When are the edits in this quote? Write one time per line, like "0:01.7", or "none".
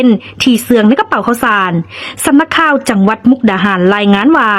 none

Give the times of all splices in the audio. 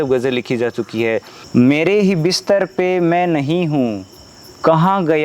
0:01.4

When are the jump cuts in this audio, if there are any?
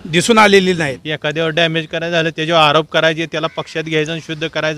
0:01.0

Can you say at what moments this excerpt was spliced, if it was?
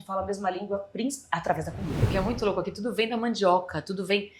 0:02.0

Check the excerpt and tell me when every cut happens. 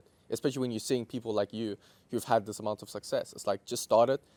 none

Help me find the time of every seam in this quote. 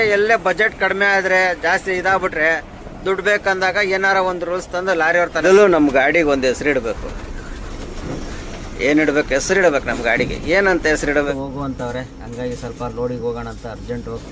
0:05.4
0:11.3

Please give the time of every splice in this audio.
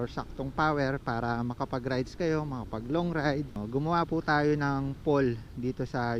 0:03.6

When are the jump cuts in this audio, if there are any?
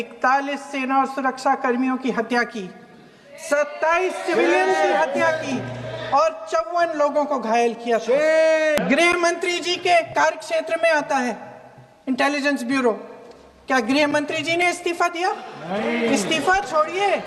0:08.8

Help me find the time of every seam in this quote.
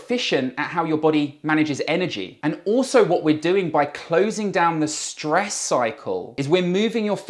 0:02.3
0:06.3

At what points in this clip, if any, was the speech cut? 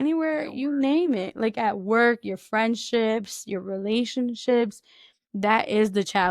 none

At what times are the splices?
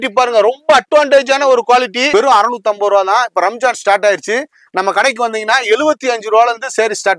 0:02.0

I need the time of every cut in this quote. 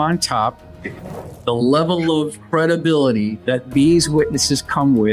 0:01.2
0:02.4
0:03.4

